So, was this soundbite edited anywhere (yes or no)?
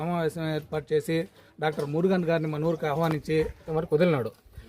yes